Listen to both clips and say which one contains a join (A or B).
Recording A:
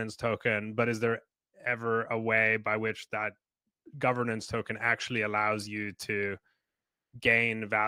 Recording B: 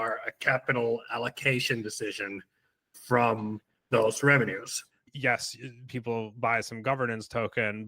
B